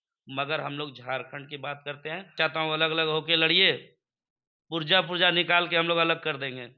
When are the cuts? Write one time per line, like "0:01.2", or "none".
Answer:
0:02.4